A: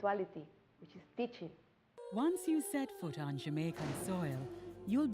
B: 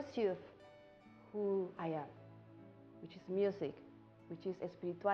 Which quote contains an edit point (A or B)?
A